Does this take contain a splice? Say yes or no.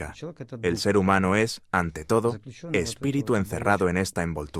no